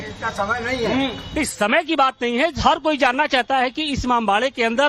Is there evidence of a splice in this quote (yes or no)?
no